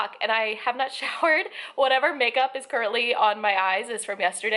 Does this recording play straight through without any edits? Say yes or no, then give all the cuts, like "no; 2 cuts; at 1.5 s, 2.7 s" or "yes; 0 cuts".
yes; 0 cuts